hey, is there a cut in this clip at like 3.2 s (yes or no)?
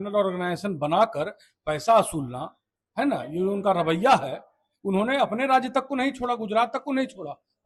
no